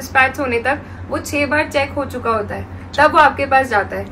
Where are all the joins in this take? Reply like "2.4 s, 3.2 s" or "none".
none